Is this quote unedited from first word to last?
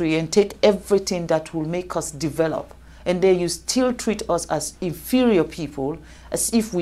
yes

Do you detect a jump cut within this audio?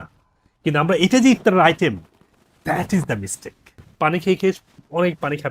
yes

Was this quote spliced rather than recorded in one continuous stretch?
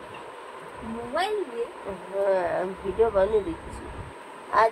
no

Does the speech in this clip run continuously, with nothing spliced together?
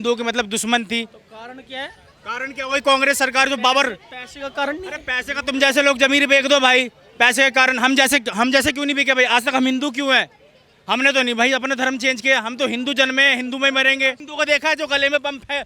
no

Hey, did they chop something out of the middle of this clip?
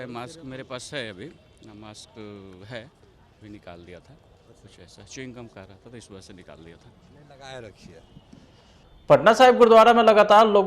yes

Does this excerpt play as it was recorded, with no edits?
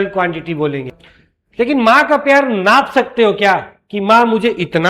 no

